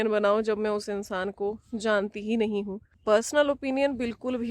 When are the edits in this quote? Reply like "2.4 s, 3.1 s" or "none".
2.8 s